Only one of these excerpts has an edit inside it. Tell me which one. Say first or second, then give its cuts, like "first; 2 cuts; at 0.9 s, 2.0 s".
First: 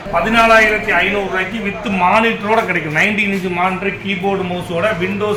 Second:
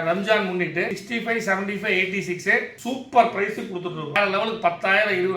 second; 3 cuts; at 1.0 s, 2.7 s, 4.1 s